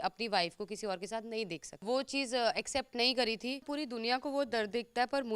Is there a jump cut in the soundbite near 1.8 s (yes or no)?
yes